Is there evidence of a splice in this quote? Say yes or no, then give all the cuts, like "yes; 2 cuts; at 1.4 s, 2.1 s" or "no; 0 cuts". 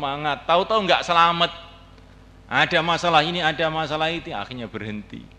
no; 0 cuts